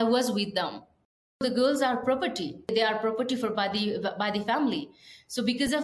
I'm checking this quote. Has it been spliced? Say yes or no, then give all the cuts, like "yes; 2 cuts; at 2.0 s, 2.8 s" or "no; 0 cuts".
yes; 2 cuts; at 1.4 s, 2.7 s